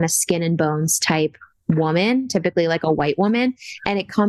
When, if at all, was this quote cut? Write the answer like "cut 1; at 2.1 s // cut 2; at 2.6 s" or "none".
none